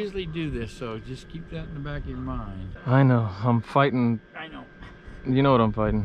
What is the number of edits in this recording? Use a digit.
1